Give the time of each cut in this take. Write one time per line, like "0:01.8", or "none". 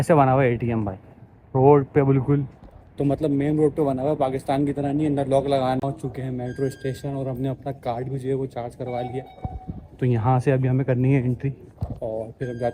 0:05.8